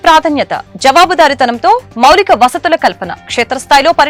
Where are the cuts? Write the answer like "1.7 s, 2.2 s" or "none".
none